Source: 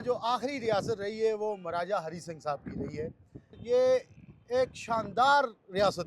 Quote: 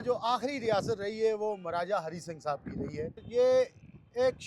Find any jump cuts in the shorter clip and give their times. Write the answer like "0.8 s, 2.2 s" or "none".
3.2 s

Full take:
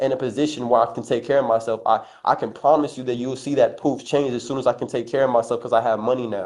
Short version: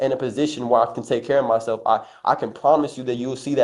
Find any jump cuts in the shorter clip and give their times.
none

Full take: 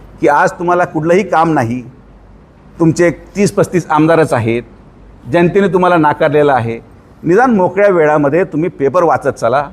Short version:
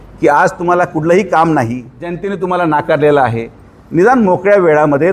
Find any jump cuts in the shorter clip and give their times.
2.3 s

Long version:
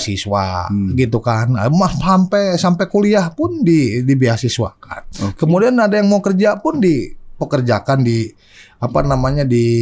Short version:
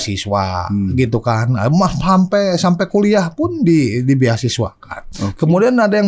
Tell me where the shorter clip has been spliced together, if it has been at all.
none

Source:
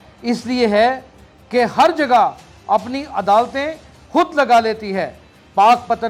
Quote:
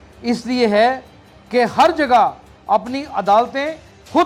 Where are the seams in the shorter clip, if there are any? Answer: none

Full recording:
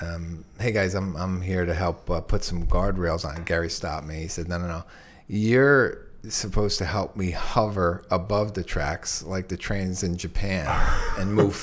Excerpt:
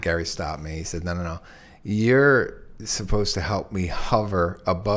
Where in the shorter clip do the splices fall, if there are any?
none

